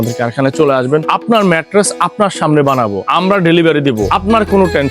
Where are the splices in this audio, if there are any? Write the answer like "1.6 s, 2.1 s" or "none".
1.1 s, 3.0 s, 4.1 s